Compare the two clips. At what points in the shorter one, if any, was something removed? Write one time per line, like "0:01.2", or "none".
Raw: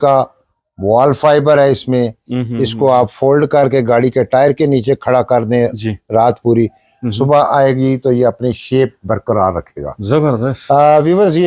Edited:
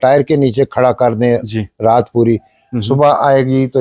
none